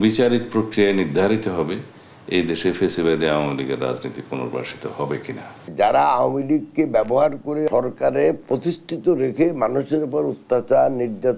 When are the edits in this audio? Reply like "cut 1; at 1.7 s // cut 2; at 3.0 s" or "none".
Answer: cut 1; at 5.6 s // cut 2; at 7.7 s